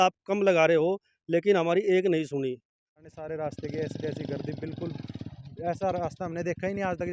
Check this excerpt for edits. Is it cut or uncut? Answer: cut